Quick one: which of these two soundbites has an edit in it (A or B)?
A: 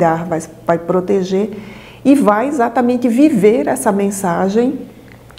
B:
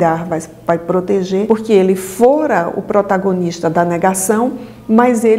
B